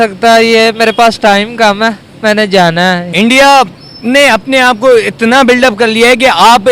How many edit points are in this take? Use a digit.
1